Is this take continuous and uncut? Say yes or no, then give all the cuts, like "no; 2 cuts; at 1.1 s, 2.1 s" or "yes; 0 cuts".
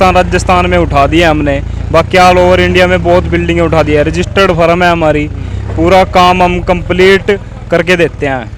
yes; 0 cuts